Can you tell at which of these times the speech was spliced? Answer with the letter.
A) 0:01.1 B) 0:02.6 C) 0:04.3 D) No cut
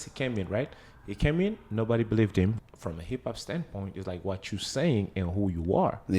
B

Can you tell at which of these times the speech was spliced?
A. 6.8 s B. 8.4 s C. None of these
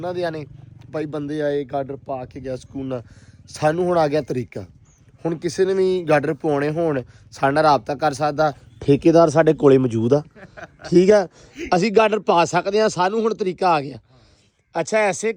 C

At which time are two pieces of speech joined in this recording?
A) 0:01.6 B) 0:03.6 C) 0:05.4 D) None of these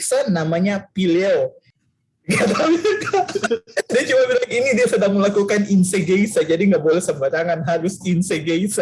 A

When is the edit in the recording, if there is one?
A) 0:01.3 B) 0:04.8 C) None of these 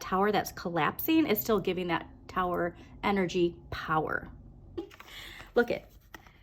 B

